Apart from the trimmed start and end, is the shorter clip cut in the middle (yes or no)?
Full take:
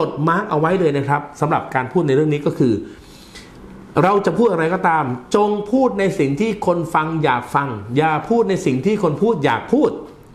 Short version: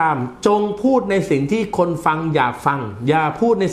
no